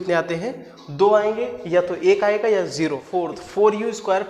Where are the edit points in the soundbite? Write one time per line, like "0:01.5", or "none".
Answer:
0:03.0